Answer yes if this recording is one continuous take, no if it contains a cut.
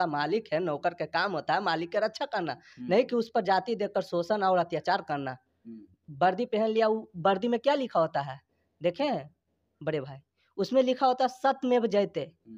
yes